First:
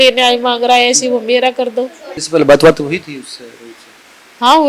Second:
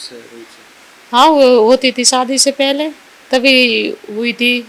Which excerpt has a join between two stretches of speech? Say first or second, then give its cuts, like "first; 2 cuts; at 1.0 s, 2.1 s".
first; 1 cut; at 2.1 s